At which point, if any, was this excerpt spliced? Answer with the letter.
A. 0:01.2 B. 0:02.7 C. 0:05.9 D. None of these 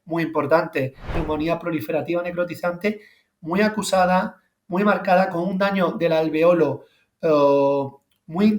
A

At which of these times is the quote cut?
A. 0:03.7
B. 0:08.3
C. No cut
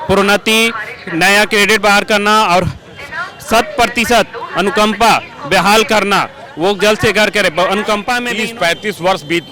B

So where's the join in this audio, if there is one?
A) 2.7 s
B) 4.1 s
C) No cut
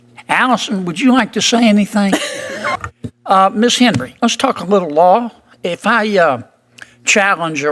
A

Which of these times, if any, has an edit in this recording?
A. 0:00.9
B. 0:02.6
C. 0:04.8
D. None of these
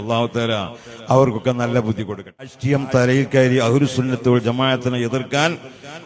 B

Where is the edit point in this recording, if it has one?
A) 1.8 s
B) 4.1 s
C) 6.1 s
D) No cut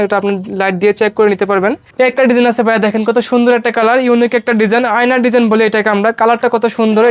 A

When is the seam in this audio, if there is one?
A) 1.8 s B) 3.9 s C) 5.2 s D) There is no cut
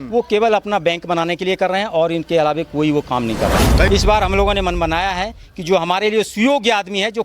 B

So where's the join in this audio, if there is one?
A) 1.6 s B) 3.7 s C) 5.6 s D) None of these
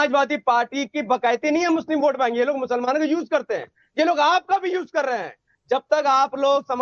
D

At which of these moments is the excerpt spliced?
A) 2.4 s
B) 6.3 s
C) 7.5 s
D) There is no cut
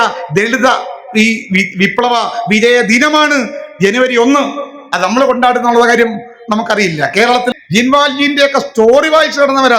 C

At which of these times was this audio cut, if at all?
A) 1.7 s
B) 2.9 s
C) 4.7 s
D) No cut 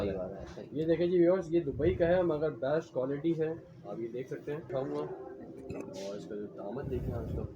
C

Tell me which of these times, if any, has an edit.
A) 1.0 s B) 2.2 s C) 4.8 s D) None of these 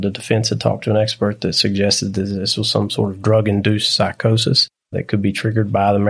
C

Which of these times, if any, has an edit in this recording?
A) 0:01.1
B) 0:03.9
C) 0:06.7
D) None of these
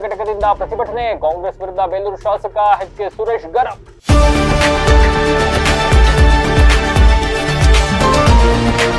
B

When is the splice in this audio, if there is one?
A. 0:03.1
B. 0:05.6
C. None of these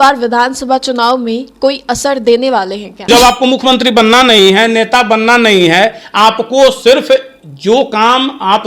A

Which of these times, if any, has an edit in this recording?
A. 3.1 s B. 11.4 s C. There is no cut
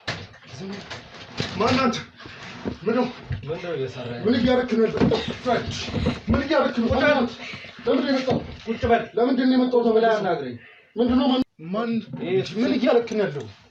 B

